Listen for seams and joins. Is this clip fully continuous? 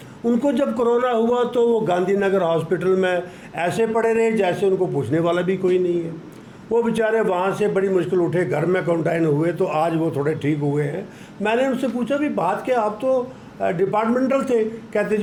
yes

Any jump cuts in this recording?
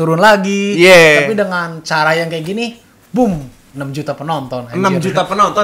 no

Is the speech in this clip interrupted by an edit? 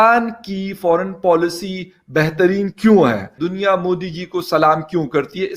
yes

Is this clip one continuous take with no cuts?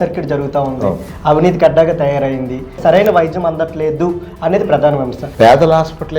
no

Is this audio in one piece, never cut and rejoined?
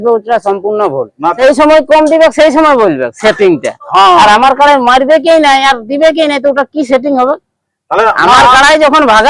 no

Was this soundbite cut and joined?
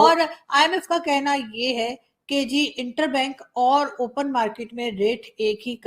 no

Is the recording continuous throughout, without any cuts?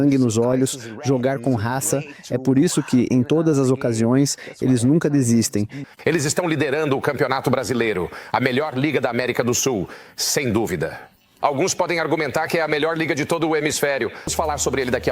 no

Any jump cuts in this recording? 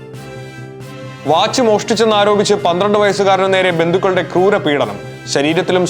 no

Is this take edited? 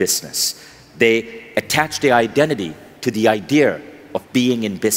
no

